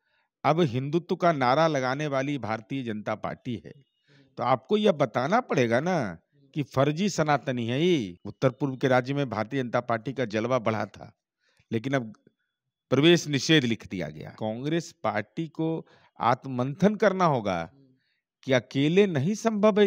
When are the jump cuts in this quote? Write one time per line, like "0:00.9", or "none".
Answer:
0:08.2
0:14.4